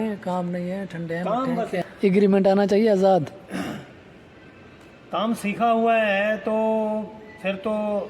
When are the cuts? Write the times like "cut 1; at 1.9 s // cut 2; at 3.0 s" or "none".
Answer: cut 1; at 1.8 s

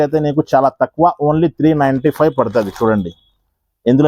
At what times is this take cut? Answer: none

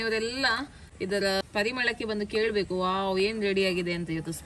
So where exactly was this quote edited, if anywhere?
cut 1; at 1.4 s

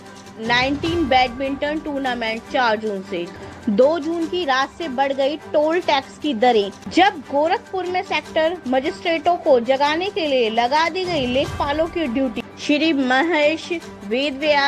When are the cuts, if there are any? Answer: cut 1; at 3.3 s // cut 2; at 6.8 s // cut 3; at 12.4 s

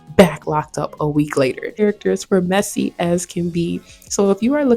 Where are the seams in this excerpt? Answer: cut 1; at 1.8 s

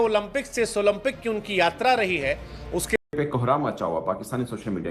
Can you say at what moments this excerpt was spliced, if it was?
cut 1; at 3.0 s

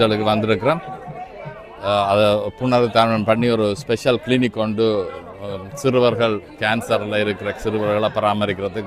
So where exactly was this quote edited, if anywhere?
none

